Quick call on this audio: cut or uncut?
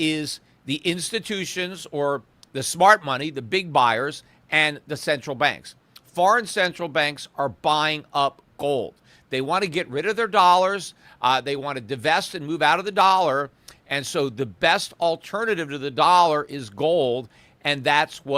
uncut